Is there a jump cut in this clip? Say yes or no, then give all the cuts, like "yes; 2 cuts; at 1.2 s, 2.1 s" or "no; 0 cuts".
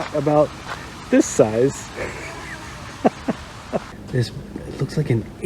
yes; 1 cut; at 4.0 s